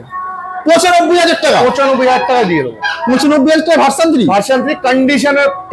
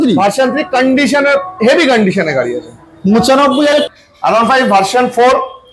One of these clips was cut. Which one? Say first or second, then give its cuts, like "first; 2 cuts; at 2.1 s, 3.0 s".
second; 1 cut; at 3.9 s